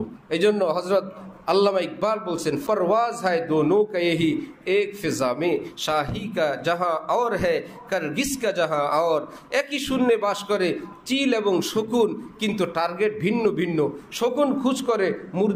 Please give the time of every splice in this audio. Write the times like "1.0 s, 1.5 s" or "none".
2.6 s

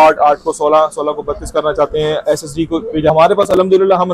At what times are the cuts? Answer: 3.1 s

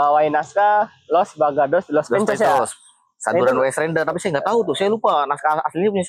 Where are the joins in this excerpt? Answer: none

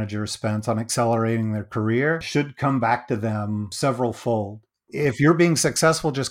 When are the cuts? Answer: 2.2 s, 3.7 s, 4.9 s

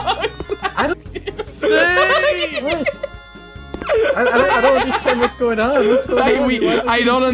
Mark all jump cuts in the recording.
1.0 s

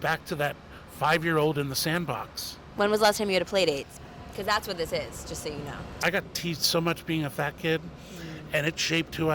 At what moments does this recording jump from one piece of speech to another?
2.6 s, 3.9 s, 6.0 s

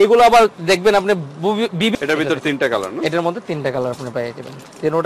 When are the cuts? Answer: 1.9 s

